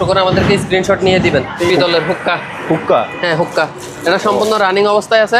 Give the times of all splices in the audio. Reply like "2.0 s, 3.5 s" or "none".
1.7 s